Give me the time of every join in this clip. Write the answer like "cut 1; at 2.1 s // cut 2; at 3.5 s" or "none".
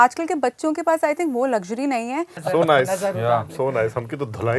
cut 1; at 2.4 s

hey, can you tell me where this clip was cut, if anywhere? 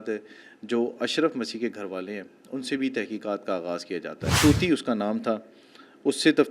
cut 1; at 4.3 s

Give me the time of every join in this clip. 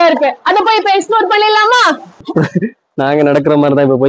cut 1; at 2.3 s

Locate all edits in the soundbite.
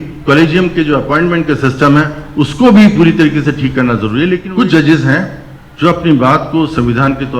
cut 1; at 4.4 s

